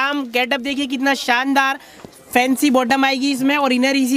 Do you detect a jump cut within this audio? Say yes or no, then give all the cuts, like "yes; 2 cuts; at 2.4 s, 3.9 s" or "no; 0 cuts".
no; 0 cuts